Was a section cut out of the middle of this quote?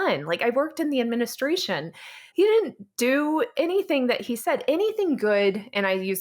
yes; 1 cut; at 2.2 s

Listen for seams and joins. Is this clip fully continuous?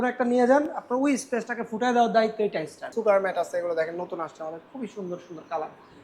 no; 1 cut; at 2.9 s

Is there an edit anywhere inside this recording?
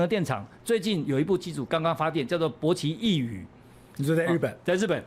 no; 0 cuts

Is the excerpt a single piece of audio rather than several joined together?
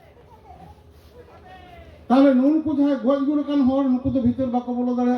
no; 1 cut; at 2.0 s

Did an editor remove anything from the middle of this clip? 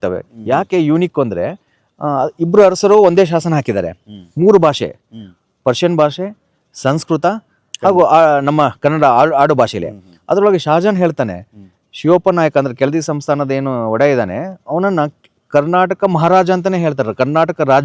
no; 0 cuts

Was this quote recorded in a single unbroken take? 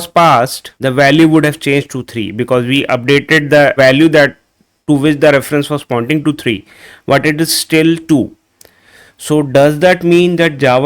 yes; 0 cuts

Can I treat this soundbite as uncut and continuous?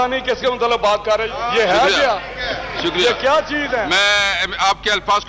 no; 2 cuts; at 1.3 s, 3.9 s

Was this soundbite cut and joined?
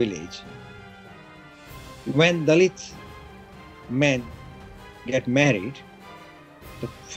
no; 0 cuts

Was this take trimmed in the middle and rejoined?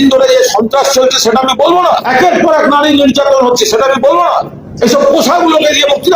yes; 2 cuts; at 2.0 s, 4.6 s

